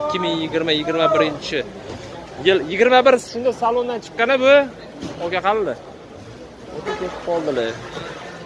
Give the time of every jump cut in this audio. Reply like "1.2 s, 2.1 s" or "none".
none

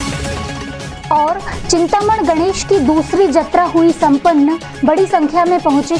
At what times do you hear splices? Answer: 1.0 s

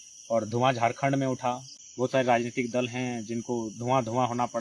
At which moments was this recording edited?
1.7 s

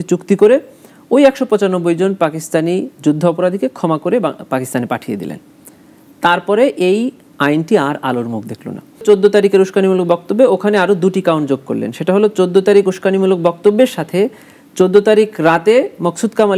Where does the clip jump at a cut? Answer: 9.0 s

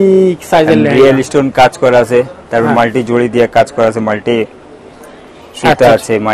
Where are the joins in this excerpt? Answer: none

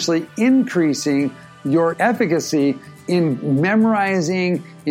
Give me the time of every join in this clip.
1.9 s

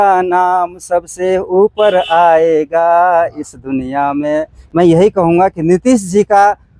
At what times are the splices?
none

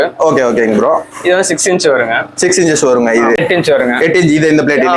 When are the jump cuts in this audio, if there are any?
3.4 s

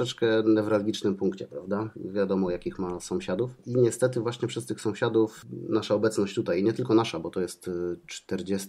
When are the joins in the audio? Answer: 2.0 s, 3.6 s, 5.4 s

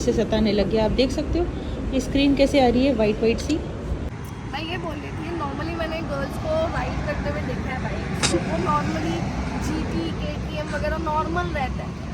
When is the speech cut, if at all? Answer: 4.1 s

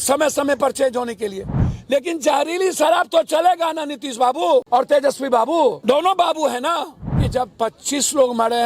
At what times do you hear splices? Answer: 1.7 s, 4.7 s, 5.8 s, 7.2 s

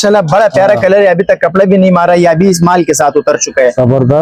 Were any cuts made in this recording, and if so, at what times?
none

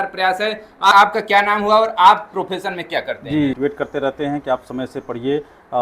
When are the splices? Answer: 0.9 s, 3.6 s

